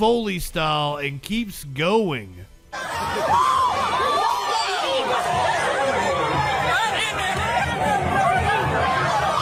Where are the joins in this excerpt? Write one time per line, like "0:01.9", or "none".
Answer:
none